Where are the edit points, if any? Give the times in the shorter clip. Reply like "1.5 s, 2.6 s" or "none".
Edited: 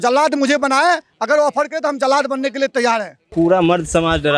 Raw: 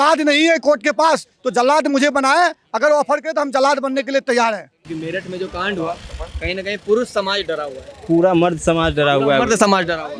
3.2 s